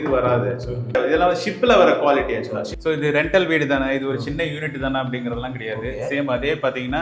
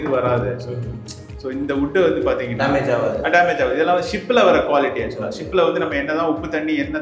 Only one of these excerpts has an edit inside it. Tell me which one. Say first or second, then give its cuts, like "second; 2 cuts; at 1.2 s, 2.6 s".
first; 2 cuts; at 0.9 s, 2.7 s